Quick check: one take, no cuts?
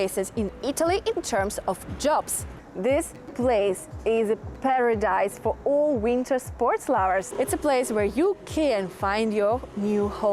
no; 2 cuts; at 2.6 s, 7.3 s

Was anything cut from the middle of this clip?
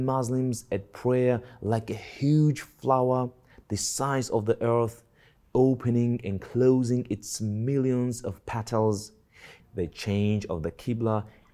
yes; 1 cut; at 9.6 s

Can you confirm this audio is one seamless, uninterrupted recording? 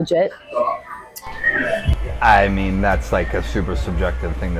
yes; 0 cuts

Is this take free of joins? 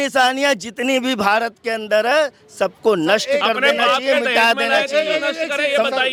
yes; 0 cuts

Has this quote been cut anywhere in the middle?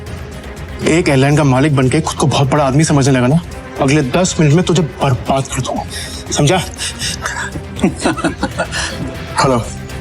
yes; 2 cuts; at 3.6 s, 8.8 s

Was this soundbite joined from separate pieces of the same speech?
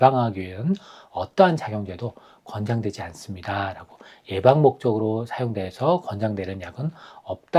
no; 0 cuts

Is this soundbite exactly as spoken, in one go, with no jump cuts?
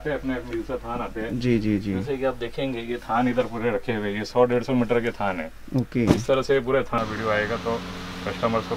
no; 1 cut; at 7.0 s

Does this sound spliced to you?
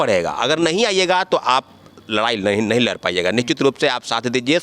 no; 0 cuts

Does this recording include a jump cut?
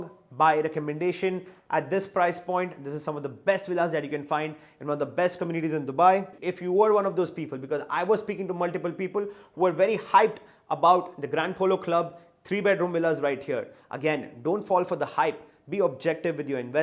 yes; 2 cuts; at 1.5 s, 6.4 s

